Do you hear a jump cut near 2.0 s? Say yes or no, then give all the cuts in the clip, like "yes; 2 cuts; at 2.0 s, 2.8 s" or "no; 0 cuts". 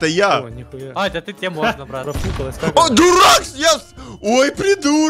yes; 1 cut; at 2.0 s